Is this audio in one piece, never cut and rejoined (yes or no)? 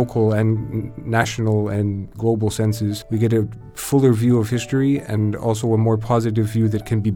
no